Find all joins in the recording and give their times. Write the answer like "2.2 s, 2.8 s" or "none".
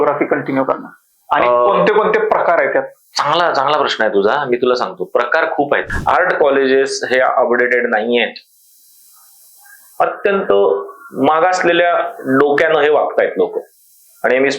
5.9 s